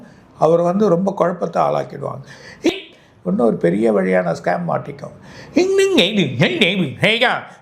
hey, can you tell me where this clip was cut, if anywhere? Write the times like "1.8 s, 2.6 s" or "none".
2.7 s